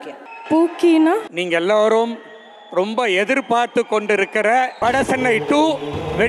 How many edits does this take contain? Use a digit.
2